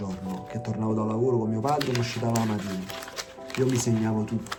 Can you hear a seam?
no; 0 cuts

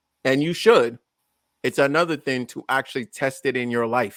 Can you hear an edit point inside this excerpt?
no; 0 cuts

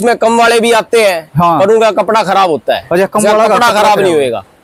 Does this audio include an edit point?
no; 0 cuts

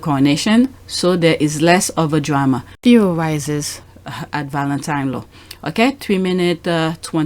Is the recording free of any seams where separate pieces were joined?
no; 1 cut; at 2.7 s

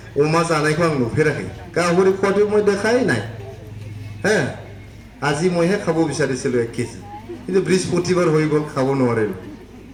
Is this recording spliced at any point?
no; 0 cuts

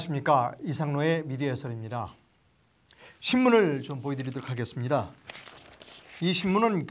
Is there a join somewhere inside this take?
no; 0 cuts

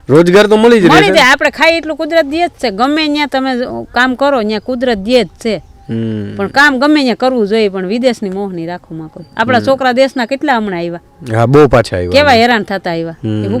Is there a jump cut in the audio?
no; 0 cuts

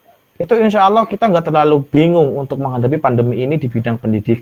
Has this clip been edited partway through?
no; 0 cuts

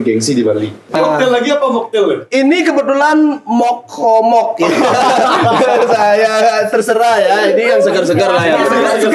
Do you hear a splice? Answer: yes; 1 cut; at 1.0 s

